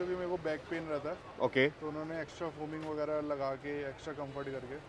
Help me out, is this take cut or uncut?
uncut